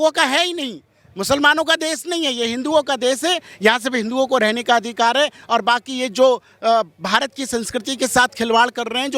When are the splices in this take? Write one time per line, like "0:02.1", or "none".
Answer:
none

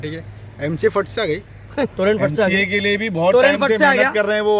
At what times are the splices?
0:01.9

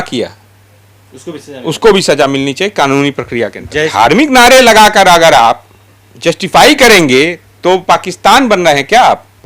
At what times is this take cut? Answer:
0:03.9

